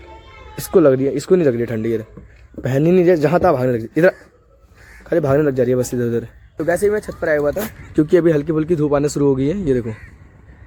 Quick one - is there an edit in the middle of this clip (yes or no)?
no